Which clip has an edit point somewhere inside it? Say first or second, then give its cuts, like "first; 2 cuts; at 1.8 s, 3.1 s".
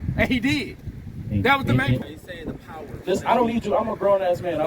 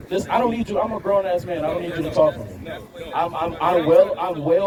first; 1 cut; at 2.0 s